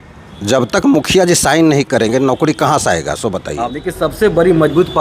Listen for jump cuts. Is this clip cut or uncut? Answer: cut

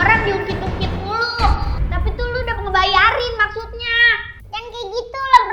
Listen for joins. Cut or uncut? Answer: uncut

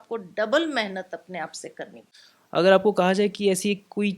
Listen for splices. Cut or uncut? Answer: cut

